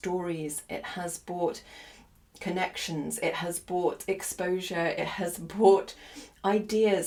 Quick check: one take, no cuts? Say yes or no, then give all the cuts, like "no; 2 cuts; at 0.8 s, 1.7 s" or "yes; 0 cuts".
yes; 0 cuts